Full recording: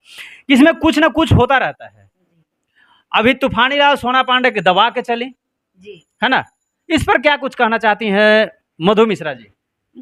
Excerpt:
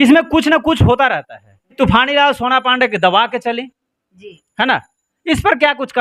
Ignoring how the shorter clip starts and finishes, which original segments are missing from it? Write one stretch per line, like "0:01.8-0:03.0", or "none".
0:02.3-0:03.4